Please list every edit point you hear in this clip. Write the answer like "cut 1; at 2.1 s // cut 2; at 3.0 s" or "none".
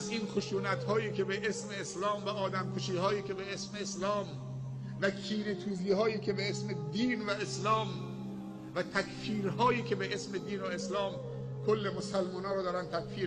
none